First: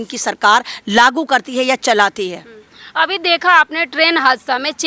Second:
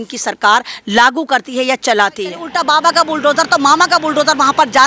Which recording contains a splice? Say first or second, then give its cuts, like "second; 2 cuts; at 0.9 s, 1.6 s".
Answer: second; 1 cut; at 2.5 s